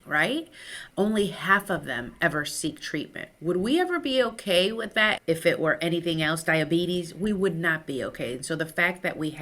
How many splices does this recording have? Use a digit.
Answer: 1